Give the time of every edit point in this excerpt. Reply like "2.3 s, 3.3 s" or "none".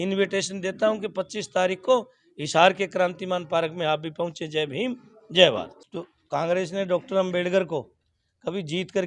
5.8 s